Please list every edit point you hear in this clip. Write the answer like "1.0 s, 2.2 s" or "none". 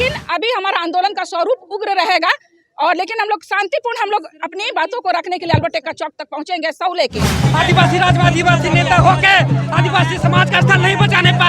7.4 s